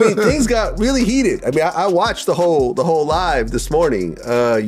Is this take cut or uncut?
uncut